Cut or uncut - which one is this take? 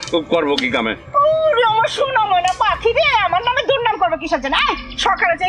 uncut